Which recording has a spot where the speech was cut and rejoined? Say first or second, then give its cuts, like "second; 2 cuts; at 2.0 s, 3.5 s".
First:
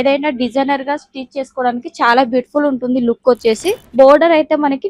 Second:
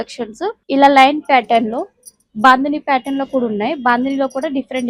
first; 1 cut; at 3.8 s